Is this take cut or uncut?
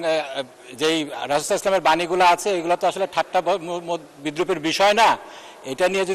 uncut